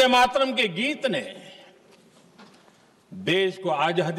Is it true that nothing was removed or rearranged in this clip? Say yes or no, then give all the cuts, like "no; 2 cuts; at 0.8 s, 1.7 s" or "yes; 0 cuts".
yes; 0 cuts